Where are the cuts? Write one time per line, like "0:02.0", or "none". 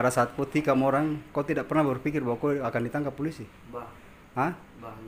none